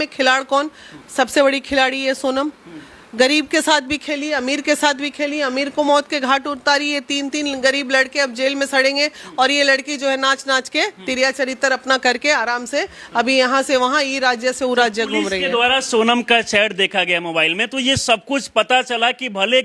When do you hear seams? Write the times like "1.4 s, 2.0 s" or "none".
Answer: none